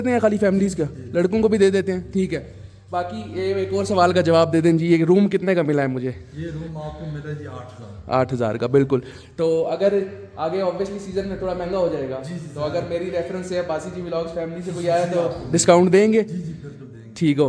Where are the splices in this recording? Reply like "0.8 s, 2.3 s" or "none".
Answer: none